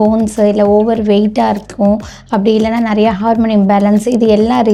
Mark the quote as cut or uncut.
uncut